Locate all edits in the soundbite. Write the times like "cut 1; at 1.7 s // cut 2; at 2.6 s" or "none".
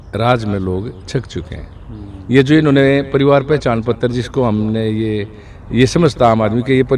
none